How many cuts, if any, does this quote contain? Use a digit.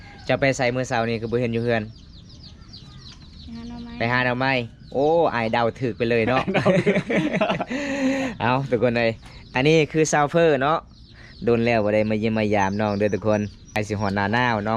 1